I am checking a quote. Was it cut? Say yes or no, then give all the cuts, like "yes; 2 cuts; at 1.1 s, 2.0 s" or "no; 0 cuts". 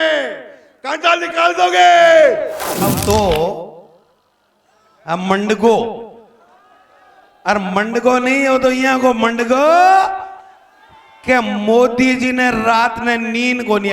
yes; 1 cut; at 2.9 s